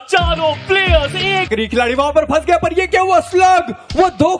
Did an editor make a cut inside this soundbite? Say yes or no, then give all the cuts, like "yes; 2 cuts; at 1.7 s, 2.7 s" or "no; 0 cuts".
yes; 1 cut; at 1.5 s